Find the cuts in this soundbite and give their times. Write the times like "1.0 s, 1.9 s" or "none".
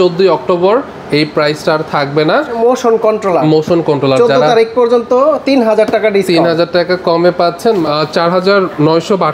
2.6 s, 7.8 s